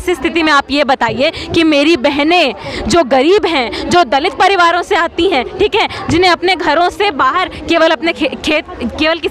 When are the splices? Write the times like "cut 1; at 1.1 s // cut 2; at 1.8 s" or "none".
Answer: none